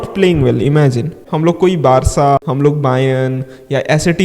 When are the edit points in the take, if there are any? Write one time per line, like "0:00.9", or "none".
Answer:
0:01.2
0:02.4